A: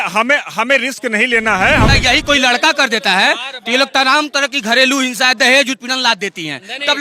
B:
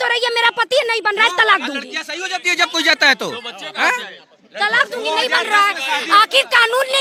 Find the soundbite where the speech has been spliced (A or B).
A